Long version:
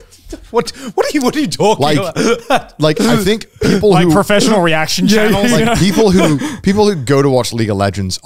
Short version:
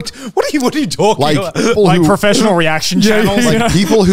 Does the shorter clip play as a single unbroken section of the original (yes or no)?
no